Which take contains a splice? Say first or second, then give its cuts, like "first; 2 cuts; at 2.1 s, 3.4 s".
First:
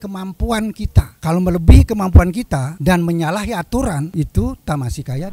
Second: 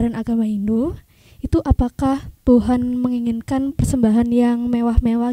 first; 3 cuts; at 1.1 s, 2.7 s, 4.1 s